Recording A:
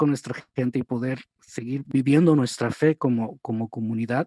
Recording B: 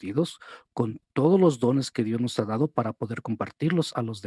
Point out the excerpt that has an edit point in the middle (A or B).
A